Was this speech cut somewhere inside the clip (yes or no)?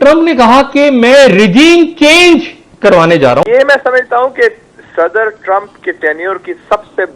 yes